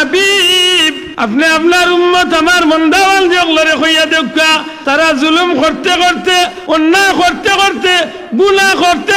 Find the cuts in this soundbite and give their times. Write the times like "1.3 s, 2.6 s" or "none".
1.0 s, 4.7 s, 6.6 s